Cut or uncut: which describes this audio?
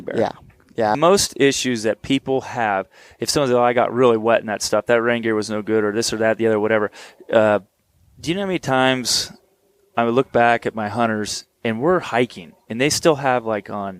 cut